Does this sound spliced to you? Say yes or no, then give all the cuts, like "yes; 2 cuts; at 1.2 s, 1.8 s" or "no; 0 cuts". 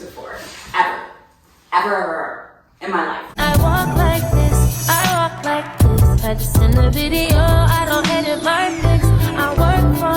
yes; 1 cut; at 3.2 s